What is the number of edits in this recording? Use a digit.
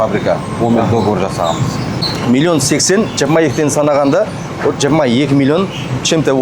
1